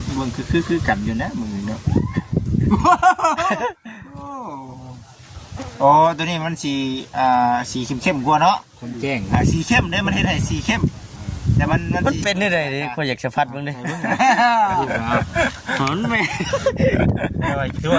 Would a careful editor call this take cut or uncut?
cut